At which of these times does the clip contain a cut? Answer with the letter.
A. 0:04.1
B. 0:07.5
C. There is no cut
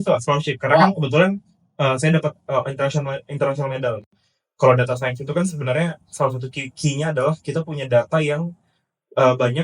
A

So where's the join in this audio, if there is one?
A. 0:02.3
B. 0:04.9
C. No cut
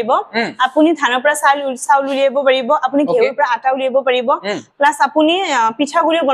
C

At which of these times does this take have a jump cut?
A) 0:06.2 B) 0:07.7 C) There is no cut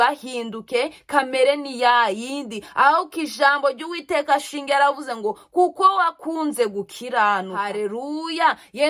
B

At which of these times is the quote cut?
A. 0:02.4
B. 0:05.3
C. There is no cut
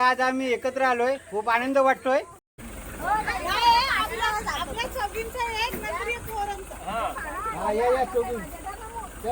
A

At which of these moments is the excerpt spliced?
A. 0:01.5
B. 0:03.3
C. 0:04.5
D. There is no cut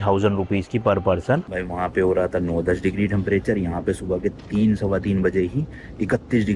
A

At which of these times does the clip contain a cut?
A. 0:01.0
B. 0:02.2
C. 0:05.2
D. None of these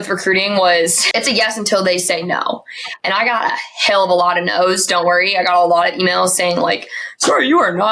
A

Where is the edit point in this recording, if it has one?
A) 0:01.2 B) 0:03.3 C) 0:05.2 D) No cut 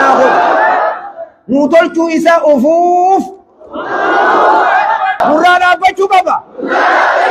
C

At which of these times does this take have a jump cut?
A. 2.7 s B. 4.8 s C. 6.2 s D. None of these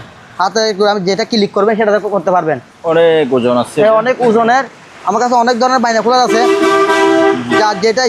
A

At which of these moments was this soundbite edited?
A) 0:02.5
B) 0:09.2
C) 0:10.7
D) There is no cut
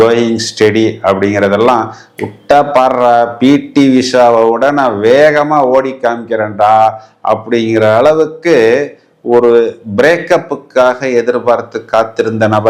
D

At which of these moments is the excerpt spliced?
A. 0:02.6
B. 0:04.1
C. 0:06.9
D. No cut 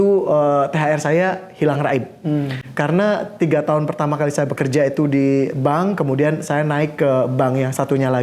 D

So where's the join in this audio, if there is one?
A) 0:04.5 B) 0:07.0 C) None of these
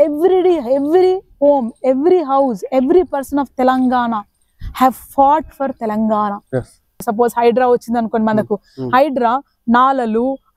B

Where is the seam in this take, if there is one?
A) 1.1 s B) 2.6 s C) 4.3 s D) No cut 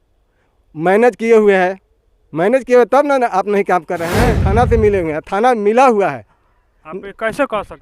C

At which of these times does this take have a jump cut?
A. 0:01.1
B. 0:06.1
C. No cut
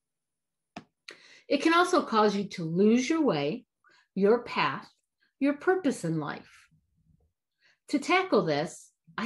C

